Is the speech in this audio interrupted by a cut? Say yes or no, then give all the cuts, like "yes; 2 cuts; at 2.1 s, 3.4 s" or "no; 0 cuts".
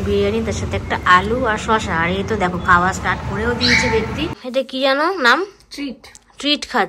yes; 1 cut; at 4.4 s